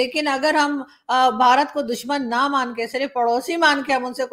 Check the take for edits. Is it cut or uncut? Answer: uncut